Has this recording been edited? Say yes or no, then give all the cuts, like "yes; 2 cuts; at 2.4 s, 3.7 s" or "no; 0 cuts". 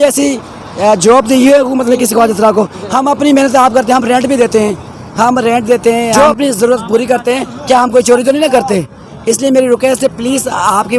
yes; 1 cut; at 6.1 s